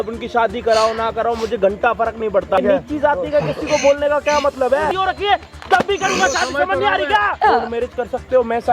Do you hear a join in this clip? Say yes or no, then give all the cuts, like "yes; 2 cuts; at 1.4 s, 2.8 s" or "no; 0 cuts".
yes; 3 cuts; at 2.6 s, 4.9 s, 7.3 s